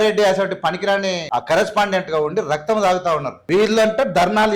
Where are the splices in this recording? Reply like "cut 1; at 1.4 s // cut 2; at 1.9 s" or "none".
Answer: cut 1; at 1.3 s